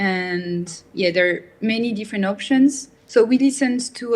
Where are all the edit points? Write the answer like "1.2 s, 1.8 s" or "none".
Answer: 2.9 s